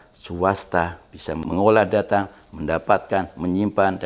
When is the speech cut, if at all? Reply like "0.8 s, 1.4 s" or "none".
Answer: 1.4 s